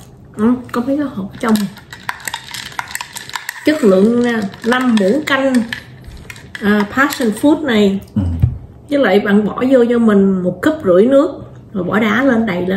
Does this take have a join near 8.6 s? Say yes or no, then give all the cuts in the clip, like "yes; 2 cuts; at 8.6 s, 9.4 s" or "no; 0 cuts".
no; 0 cuts